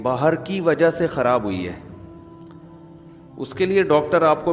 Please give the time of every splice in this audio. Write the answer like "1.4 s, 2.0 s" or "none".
1.9 s, 3.4 s

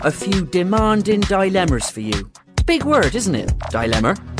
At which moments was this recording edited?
none

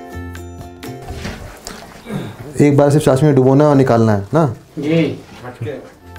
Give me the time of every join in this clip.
1.2 s

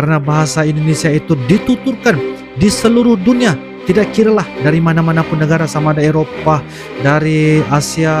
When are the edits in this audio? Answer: none

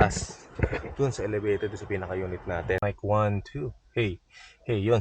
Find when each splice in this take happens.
2.8 s

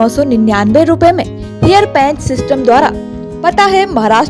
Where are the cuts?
3.2 s

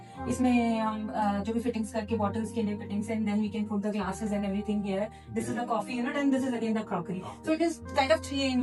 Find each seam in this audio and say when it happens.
none

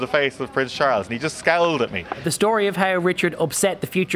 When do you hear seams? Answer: 2.2 s

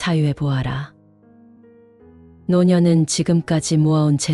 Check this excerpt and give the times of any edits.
0.9 s, 2.4 s

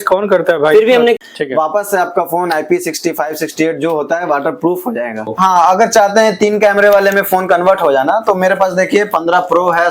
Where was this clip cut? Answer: 1.2 s, 5.3 s

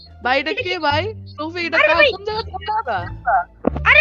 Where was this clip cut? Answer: none

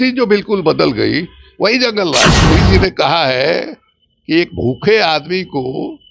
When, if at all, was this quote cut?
2.4 s

